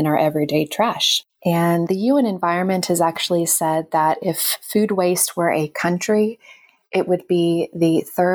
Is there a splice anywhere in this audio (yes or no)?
yes